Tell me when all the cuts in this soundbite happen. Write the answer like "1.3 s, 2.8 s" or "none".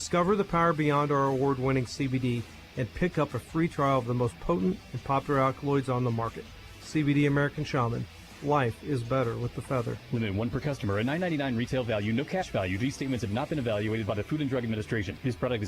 none